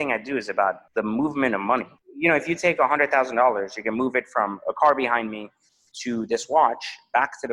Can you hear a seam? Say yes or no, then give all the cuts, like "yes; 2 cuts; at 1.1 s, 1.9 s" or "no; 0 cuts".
yes; 2 cuts; at 0.8 s, 2.0 s